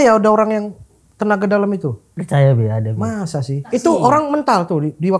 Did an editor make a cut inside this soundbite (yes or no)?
yes